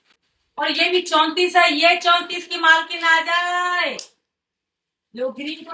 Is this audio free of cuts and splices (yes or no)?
yes